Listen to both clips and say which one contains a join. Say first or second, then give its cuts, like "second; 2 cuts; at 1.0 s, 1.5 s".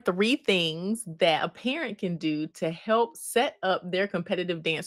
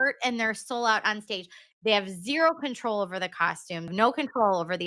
second; 2 cuts; at 1.6 s, 3.9 s